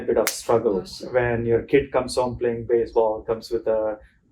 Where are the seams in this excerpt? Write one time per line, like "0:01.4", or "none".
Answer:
0:01.0